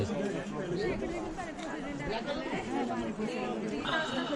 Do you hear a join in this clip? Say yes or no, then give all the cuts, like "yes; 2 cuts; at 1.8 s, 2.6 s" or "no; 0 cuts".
no; 0 cuts